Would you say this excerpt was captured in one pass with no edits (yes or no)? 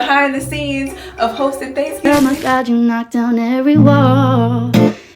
no